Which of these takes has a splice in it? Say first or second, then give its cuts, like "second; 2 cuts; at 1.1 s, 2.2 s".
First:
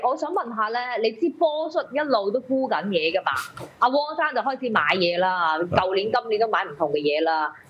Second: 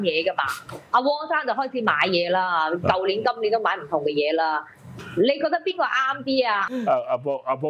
second; 1 cut; at 6.7 s